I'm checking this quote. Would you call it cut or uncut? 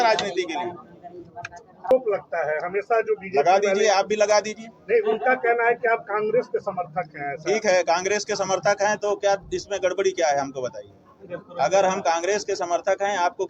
cut